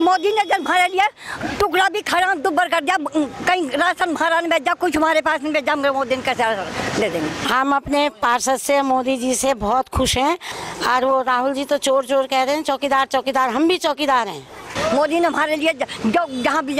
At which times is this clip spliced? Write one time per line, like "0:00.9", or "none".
0:07.4
0:10.5
0:14.7